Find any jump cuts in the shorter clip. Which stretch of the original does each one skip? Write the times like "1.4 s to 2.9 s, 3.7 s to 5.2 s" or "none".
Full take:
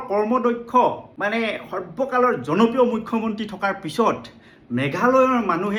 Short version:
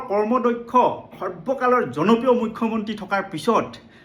1.1 s to 1.6 s